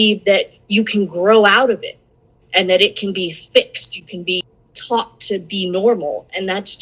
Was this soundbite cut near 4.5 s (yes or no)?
yes